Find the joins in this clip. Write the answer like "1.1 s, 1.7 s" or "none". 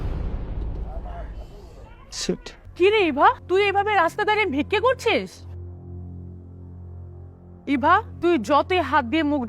2.6 s, 3.4 s, 8.1 s